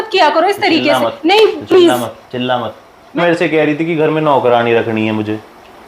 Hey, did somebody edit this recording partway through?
yes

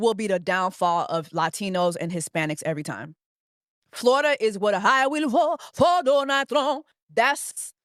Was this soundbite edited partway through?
no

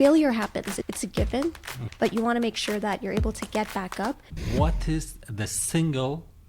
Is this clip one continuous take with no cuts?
no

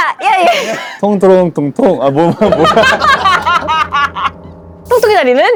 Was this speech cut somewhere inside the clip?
no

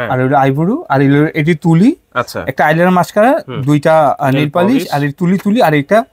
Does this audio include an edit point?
no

